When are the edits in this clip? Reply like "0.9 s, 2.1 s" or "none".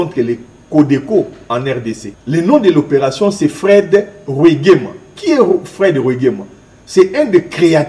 2.1 s